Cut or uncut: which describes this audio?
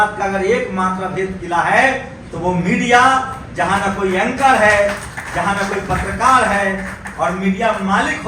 uncut